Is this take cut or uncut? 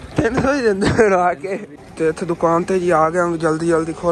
cut